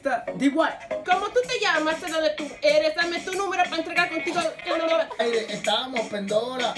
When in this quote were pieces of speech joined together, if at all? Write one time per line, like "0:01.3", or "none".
0:01.0
0:05.2

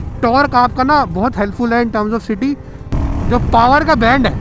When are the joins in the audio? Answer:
0:02.8

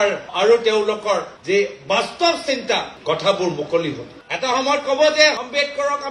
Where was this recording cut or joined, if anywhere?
0:04.1

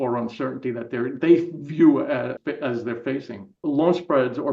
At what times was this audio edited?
0:02.4
0:03.6

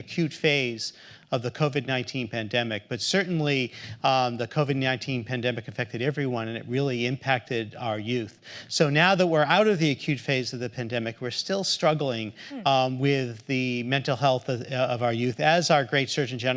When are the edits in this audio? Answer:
none

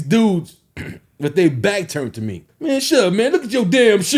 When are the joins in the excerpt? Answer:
0:02.4

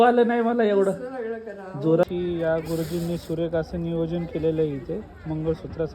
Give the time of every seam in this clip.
0:02.0

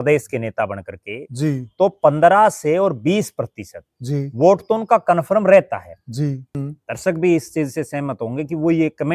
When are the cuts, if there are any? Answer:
0:06.5

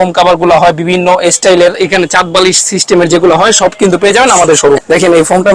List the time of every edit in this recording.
0:01.8
0:04.8

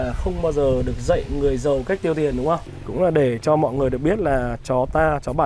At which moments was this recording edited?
0:02.6

